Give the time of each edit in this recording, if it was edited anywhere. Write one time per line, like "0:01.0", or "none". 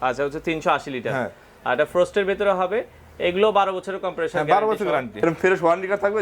0:05.2